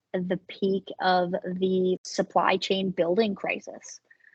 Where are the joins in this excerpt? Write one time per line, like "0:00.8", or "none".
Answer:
none